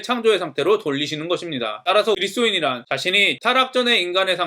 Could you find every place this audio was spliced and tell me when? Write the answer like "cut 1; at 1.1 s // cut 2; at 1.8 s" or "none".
cut 1; at 2.2 s // cut 2; at 3.3 s